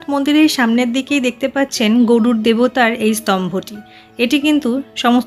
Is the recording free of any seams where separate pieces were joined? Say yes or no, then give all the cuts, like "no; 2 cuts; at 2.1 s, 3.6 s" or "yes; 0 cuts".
yes; 0 cuts